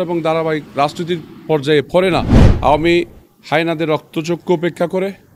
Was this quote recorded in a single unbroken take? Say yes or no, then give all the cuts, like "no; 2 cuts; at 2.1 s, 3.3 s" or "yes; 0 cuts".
no; 1 cut; at 2.5 s